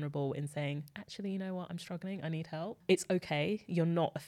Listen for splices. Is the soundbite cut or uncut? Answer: uncut